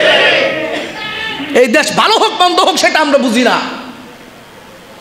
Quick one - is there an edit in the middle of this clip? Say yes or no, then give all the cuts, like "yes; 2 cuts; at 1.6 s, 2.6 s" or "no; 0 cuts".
no; 0 cuts